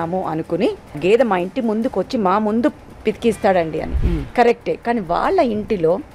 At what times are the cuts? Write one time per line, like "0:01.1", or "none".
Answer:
0:01.0

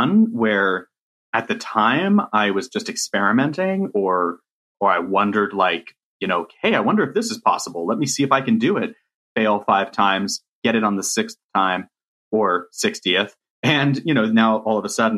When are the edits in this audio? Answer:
none

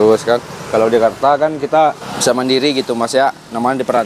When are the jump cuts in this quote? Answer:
0:02.1

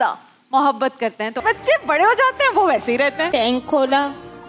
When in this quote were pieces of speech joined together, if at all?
0:01.4
0:03.3

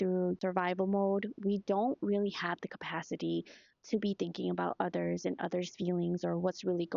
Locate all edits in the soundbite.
none

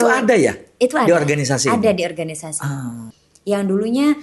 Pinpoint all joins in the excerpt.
0:03.1

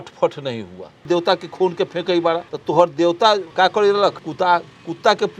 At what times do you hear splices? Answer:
0:01.1
0:02.5
0:03.5
0:04.2

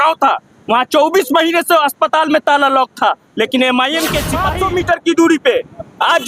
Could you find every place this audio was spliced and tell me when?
0:04.5

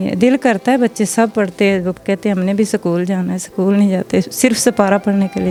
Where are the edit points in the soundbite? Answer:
none

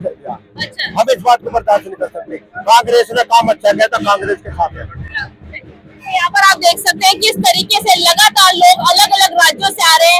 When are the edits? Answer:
none

